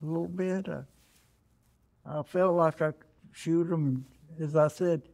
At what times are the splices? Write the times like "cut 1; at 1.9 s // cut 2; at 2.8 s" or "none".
none